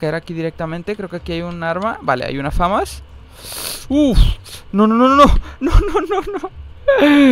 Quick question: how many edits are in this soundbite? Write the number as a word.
zero